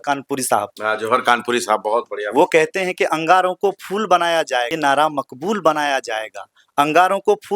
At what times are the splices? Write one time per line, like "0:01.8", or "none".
0:04.7